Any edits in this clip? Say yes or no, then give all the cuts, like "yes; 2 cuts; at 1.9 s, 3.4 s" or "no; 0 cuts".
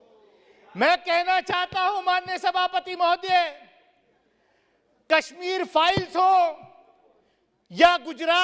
no; 0 cuts